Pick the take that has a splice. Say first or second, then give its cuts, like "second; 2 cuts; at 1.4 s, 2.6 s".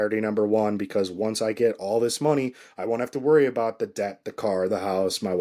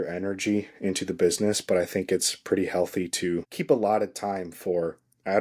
second; 1 cut; at 3.5 s